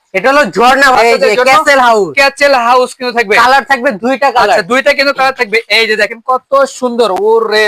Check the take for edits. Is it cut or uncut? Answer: cut